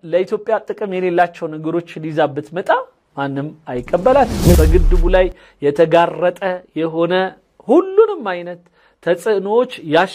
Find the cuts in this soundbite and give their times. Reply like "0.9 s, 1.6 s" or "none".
4.6 s